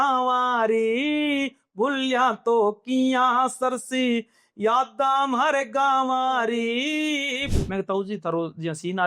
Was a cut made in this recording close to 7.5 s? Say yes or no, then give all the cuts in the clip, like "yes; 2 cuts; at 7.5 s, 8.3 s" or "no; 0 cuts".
yes; 1 cut; at 7.5 s